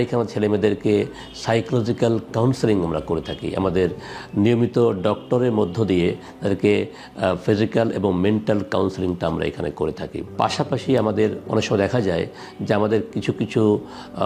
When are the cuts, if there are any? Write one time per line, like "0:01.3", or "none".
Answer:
none